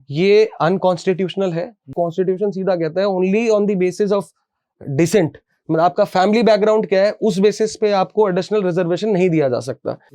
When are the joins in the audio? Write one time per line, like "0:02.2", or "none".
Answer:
0:01.9